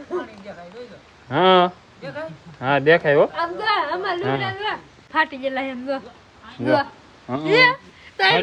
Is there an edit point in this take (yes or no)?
no